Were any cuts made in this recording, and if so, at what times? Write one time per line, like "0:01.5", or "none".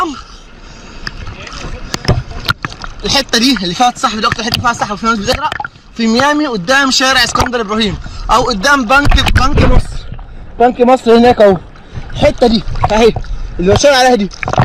none